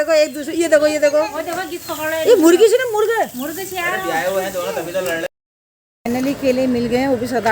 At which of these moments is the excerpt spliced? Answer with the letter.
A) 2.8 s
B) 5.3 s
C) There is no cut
B